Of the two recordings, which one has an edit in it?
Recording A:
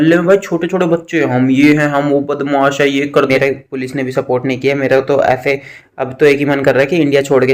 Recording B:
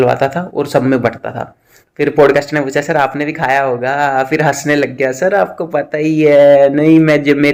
A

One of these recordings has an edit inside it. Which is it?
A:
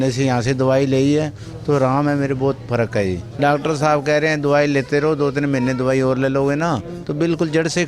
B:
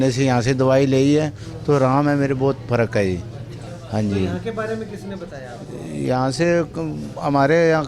A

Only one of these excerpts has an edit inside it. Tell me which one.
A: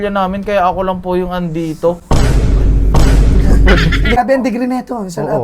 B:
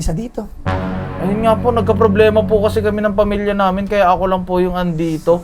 A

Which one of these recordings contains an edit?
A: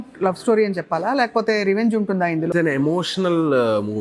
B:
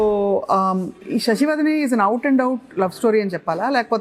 A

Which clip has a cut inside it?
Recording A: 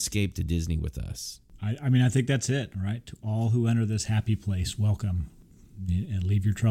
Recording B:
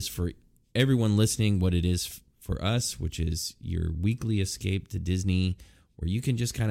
A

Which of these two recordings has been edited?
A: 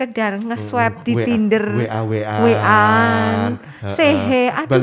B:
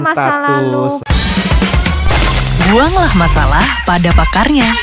B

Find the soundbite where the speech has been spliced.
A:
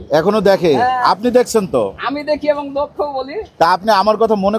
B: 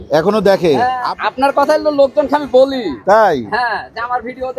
B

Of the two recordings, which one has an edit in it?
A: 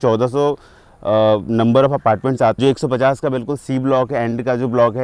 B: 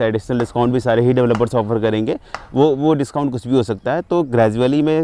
A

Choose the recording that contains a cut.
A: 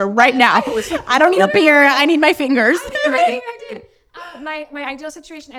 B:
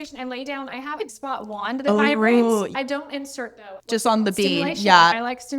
B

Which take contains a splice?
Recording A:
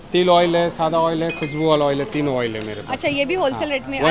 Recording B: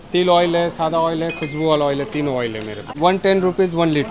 B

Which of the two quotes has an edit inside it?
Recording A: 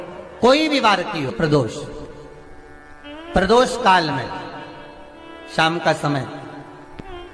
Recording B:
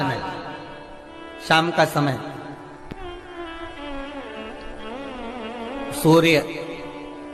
A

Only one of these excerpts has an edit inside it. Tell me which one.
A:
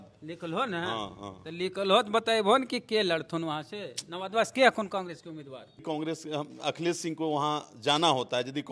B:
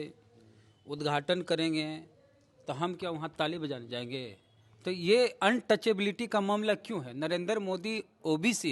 A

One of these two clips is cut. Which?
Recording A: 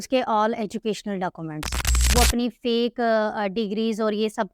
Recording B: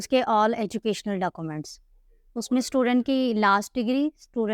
A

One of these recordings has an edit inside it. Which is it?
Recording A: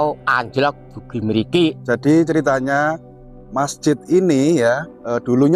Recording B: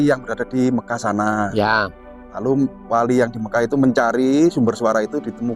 A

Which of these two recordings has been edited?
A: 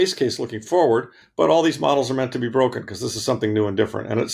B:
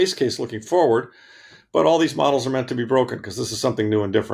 A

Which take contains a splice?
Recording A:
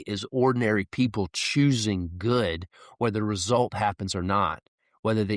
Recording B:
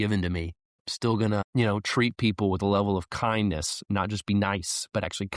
B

